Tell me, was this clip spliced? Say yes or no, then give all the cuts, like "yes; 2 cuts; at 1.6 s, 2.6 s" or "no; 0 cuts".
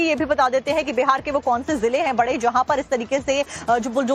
no; 0 cuts